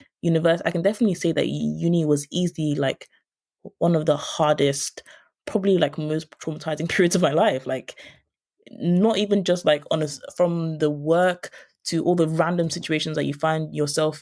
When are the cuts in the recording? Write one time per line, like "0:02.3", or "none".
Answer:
none